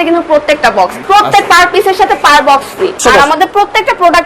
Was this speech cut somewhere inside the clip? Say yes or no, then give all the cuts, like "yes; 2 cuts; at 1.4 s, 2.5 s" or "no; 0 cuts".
yes; 2 cuts; at 0.9 s, 3.0 s